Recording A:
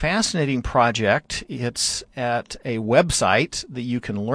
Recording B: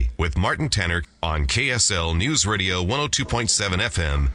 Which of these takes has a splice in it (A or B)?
B